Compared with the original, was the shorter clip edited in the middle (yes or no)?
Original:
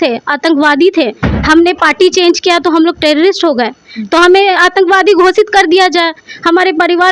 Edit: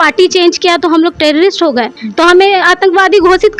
yes